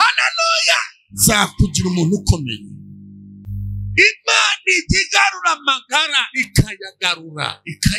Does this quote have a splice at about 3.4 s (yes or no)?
yes